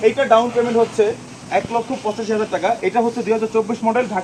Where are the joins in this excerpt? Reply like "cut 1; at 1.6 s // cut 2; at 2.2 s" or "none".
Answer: none